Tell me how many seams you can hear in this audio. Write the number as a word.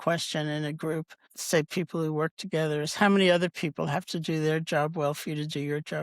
one